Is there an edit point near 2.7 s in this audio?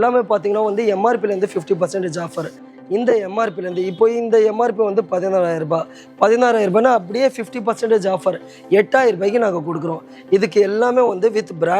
yes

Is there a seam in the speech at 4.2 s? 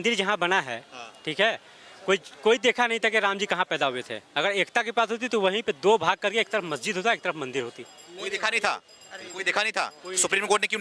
no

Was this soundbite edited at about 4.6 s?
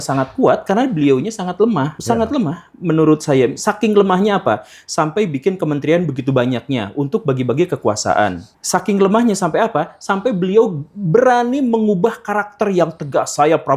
no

